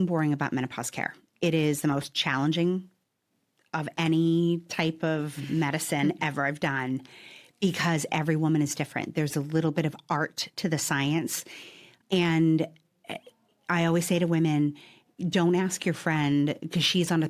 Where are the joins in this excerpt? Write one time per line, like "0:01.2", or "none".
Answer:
none